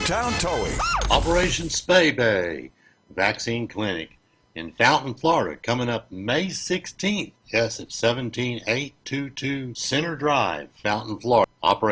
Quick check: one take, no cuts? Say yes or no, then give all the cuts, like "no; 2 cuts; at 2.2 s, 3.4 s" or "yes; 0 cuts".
no; 1 cut; at 1.0 s